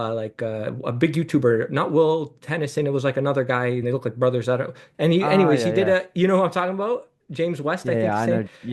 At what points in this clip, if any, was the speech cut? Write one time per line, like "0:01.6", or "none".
none

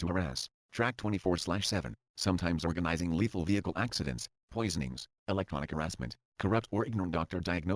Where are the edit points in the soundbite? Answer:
0:01.1
0:06.2

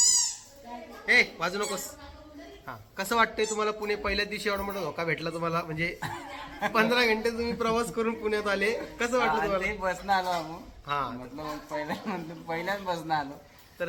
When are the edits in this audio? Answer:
none

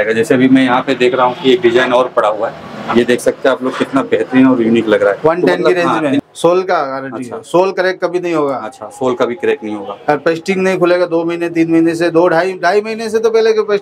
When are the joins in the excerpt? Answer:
0:06.2

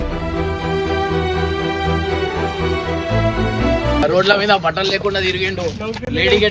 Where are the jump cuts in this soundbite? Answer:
0:04.0

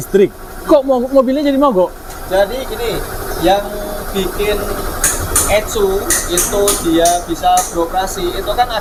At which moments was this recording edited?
none

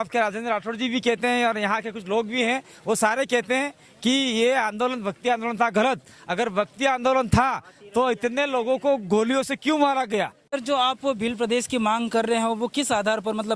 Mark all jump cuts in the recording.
0:10.5

